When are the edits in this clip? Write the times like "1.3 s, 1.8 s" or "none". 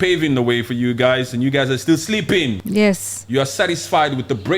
2.6 s